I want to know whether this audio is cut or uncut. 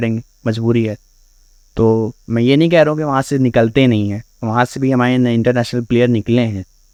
uncut